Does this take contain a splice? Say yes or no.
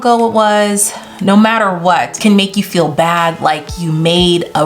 yes